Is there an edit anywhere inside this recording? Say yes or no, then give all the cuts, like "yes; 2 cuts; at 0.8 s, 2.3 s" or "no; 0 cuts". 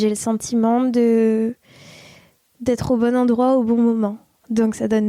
no; 0 cuts